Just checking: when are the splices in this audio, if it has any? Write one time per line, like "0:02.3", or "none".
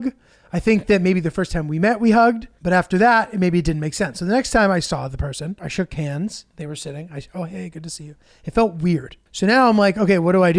0:02.5
0:05.6
0:09.2